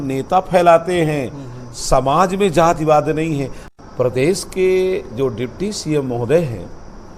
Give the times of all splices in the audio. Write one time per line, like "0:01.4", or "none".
0:03.6